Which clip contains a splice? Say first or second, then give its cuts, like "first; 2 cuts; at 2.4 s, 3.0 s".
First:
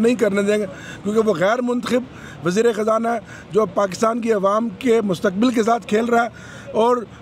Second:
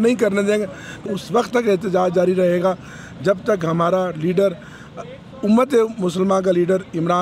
second; 1 cut; at 1.1 s